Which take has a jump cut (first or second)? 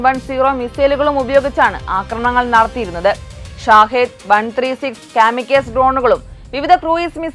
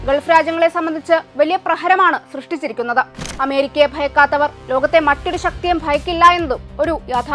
second